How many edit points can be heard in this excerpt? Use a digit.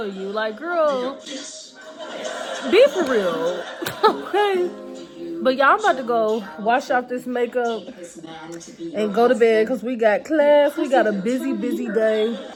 0